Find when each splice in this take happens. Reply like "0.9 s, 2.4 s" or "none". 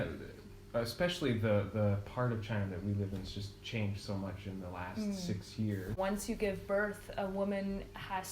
6.0 s